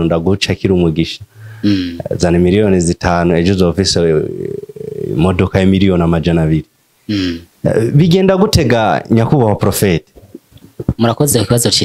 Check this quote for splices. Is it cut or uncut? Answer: uncut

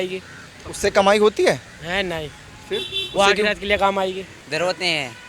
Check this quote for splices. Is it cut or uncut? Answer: cut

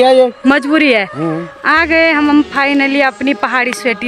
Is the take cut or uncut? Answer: cut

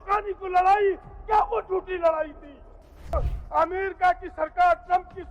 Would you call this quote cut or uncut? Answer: cut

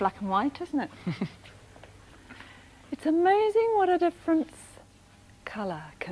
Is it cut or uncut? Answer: cut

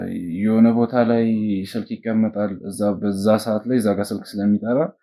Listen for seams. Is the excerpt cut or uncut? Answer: uncut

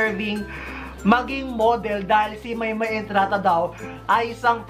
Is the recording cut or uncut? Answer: uncut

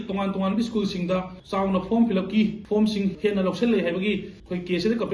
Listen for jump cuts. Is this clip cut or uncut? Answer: cut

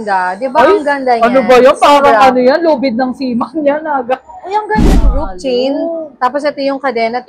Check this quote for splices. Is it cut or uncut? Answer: cut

